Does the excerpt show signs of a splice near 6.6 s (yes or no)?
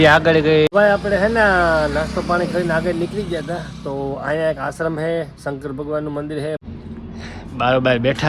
yes